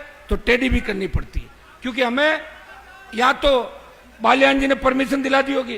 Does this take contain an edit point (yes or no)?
no